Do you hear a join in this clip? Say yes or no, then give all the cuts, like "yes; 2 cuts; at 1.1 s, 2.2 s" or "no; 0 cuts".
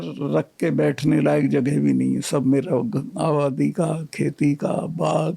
no; 0 cuts